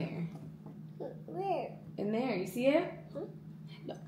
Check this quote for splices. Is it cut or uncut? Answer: uncut